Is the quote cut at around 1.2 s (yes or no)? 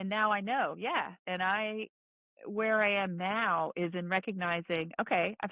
yes